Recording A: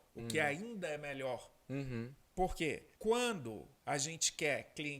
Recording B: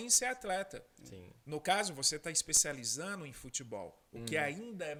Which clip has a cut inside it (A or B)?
A